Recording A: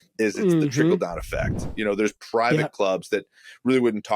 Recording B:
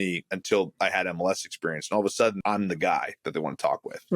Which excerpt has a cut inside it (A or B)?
B